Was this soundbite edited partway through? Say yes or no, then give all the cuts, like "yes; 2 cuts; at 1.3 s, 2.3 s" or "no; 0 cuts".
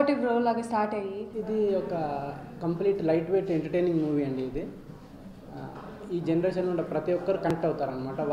yes; 1 cut; at 1.3 s